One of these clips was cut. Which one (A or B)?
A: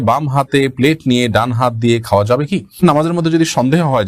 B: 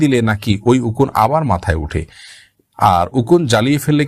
A